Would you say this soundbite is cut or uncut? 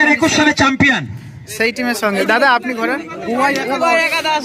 uncut